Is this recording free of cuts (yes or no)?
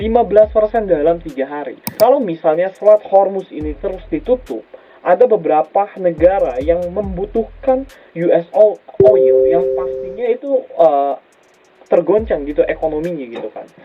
no